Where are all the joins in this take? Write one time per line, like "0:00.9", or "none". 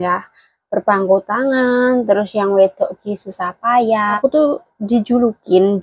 0:04.2